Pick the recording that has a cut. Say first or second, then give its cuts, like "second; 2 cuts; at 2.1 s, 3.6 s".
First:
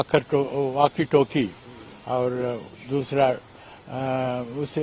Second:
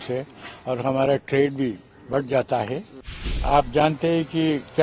second; 1 cut; at 3.3 s